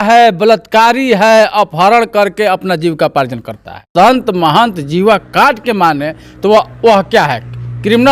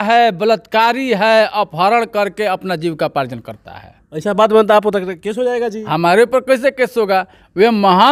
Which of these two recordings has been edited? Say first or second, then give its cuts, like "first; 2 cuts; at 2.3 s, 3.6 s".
first; 1 cut; at 3.9 s